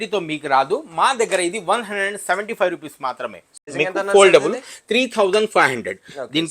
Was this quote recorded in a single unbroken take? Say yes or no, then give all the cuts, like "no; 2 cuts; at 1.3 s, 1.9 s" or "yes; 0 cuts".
no; 1 cut; at 3.7 s